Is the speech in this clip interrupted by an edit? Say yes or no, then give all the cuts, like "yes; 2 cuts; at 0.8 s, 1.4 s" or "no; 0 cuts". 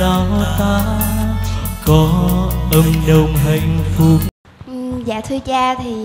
yes; 1 cut; at 4.3 s